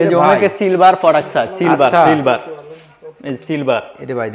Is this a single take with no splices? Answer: yes; 0 cuts

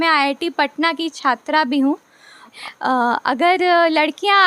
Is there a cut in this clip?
yes; 1 cut; at 2.5 s

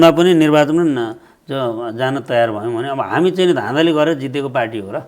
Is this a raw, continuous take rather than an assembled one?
yes; 0 cuts

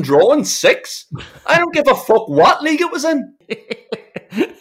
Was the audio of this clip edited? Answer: yes; 1 cut; at 3.4 s

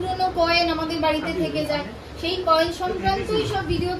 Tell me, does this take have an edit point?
no; 0 cuts

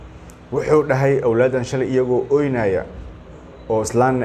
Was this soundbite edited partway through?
no; 0 cuts

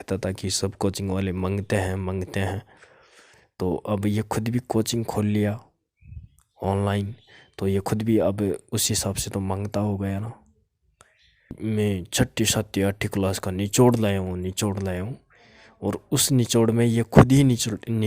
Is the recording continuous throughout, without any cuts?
no; 1 cut; at 11.6 s

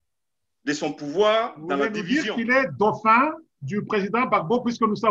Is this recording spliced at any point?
yes; 1 cut; at 1.9 s

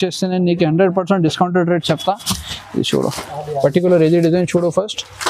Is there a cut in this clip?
no; 0 cuts

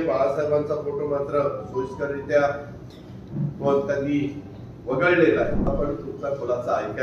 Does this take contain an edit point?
yes; 1 cut; at 5.7 s

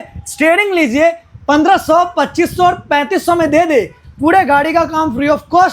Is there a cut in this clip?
no; 0 cuts

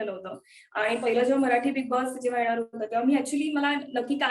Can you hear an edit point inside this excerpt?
no; 0 cuts

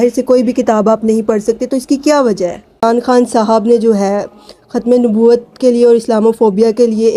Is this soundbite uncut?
no; 1 cut; at 2.8 s

